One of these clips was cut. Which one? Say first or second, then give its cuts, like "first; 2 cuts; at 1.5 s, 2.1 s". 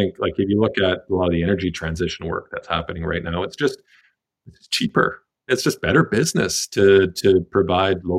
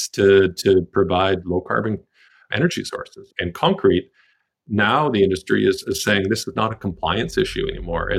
second; 1 cut; at 3.2 s